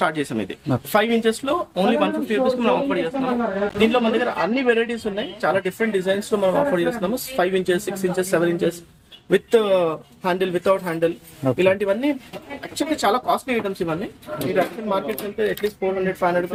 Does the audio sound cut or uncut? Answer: uncut